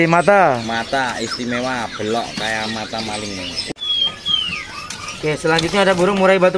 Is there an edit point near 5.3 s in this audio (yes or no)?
no